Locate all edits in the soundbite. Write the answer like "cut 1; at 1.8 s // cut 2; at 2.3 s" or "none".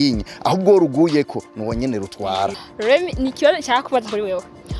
cut 1; at 2.6 s